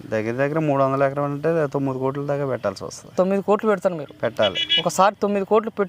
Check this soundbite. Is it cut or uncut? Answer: uncut